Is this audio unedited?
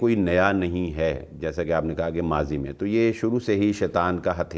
yes; 0 cuts

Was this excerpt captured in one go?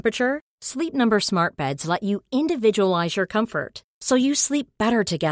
yes; 0 cuts

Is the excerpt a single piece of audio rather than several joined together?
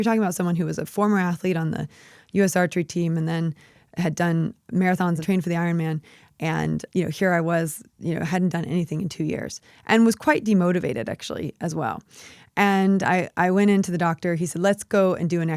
yes; 0 cuts

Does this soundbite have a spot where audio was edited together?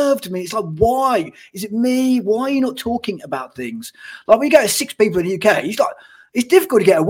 no; 0 cuts

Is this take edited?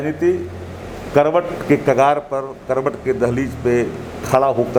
no; 0 cuts

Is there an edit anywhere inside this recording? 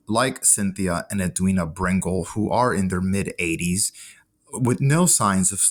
no; 0 cuts

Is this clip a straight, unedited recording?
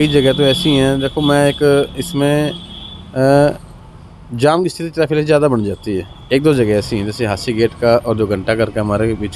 yes; 0 cuts

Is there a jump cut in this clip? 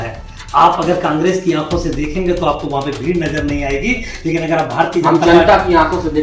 no; 0 cuts

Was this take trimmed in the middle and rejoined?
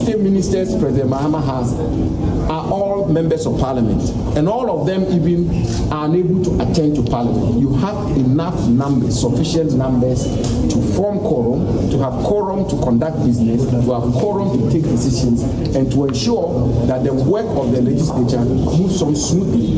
no; 0 cuts

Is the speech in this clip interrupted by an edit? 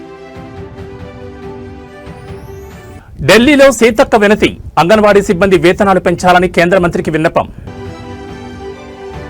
yes; 1 cut; at 2.3 s

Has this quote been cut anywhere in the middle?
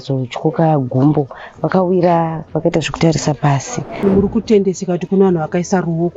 yes; 1 cut; at 4.0 s

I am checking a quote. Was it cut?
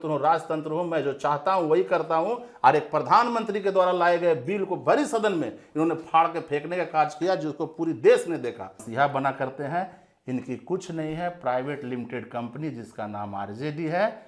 yes; 1 cut; at 8.8 s

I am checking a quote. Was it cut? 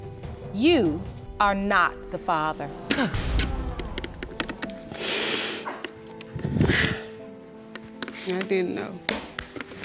yes; 2 cuts; at 1.2 s, 7.9 s

